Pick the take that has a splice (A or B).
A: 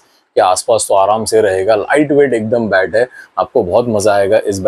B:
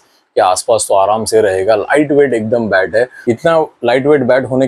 B